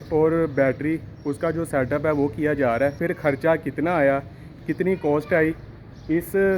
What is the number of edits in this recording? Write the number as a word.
one